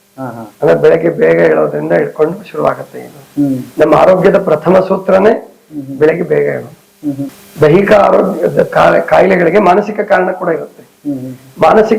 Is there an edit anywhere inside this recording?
yes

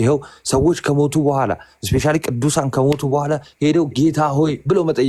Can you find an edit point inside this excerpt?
no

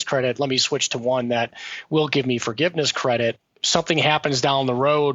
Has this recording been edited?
yes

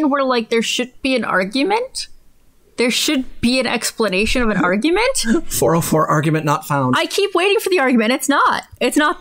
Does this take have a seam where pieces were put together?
no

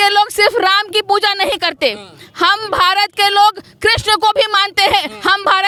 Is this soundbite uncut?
yes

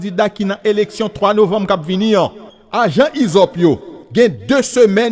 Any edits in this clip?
no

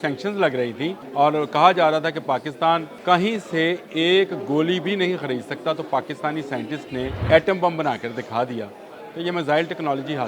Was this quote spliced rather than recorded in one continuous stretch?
yes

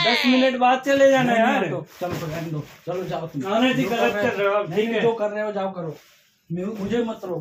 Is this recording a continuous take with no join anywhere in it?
yes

